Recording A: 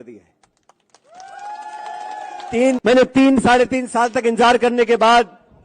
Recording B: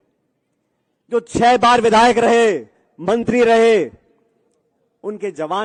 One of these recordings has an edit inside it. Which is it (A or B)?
A